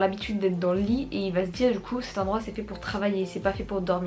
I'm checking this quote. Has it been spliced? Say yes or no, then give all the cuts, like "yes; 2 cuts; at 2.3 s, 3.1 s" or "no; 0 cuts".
no; 0 cuts